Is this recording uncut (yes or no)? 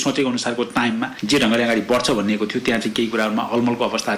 no